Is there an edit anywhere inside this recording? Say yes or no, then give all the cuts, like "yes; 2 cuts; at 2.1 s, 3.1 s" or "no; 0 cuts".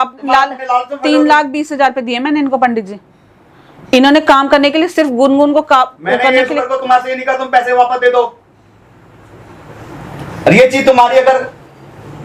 no; 0 cuts